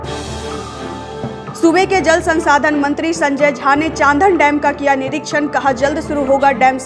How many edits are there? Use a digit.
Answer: 0